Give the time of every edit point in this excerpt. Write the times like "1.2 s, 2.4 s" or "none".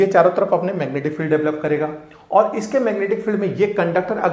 none